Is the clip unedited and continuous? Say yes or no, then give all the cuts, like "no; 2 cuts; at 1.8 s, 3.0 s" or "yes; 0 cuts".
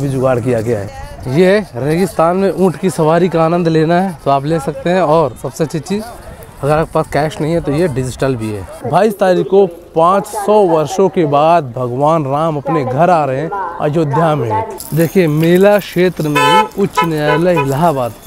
no; 3 cuts; at 0.9 s, 8.7 s, 14.8 s